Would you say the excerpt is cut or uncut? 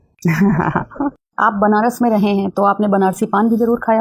uncut